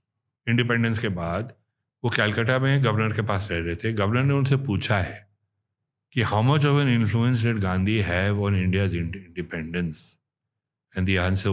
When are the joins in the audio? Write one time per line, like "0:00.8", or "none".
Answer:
none